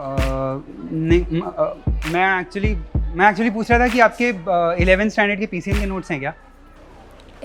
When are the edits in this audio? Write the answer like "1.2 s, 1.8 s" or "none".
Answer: none